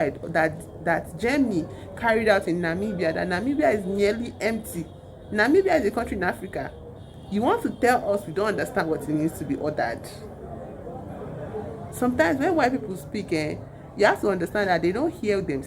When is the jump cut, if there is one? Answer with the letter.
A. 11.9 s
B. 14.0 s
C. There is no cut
A